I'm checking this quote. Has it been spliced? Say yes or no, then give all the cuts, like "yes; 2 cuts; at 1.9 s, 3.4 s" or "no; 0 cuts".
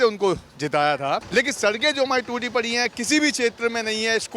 yes; 1 cut; at 1.3 s